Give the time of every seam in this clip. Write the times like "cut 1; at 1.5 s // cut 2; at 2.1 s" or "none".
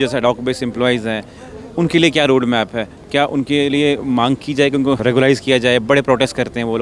cut 1; at 5.0 s